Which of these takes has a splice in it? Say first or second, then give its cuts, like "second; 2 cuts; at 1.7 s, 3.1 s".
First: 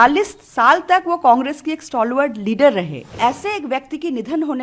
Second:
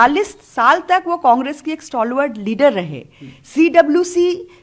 first; 1 cut; at 3.0 s